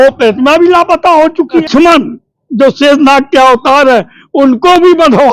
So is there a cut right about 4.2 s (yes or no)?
no